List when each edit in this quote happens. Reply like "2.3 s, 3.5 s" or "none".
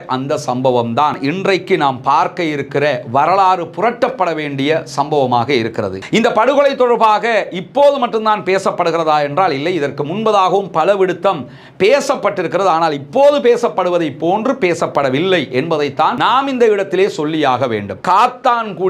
6.0 s, 18.0 s